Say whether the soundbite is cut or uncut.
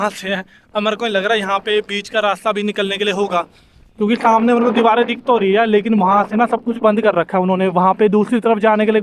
uncut